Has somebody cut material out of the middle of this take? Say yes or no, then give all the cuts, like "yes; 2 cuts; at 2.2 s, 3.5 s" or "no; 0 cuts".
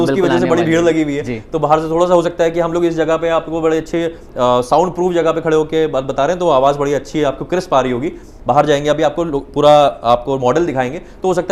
no; 0 cuts